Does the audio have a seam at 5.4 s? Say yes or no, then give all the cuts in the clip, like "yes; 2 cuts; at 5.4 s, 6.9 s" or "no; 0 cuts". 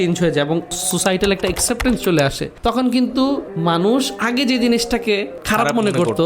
yes; 4 cuts; at 0.8 s, 2.5 s, 3.5 s, 5.4 s